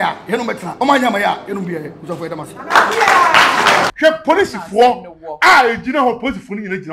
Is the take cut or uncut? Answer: cut